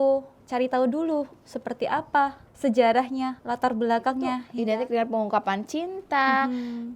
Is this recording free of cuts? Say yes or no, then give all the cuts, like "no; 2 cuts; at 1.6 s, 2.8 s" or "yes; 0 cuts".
no; 2 cuts; at 2.4 s, 4.5 s